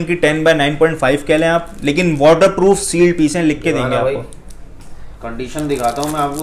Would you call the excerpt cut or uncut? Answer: uncut